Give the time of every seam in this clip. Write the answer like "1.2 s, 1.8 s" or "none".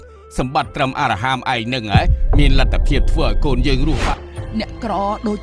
4.0 s